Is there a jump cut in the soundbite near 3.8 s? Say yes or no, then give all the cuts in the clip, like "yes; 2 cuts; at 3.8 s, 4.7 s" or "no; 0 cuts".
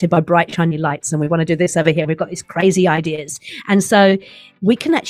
no; 0 cuts